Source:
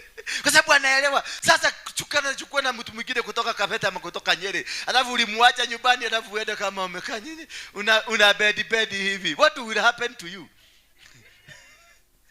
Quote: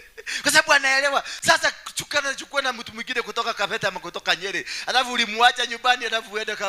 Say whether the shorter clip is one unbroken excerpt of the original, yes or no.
yes